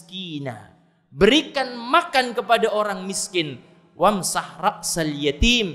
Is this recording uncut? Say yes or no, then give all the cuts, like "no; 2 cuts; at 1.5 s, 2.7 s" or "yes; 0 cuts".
yes; 0 cuts